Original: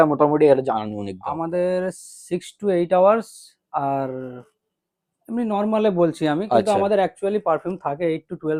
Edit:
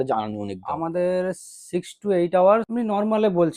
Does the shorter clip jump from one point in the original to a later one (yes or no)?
yes